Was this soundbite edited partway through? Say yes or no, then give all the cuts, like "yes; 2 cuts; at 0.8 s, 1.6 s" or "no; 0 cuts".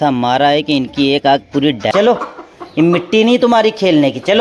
yes; 1 cut; at 1.9 s